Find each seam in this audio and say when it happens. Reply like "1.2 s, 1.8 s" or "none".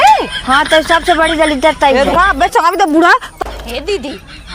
3.3 s